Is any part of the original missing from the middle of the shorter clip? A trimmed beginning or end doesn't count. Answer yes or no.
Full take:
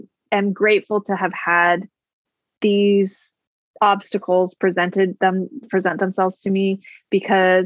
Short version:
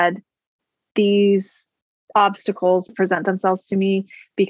yes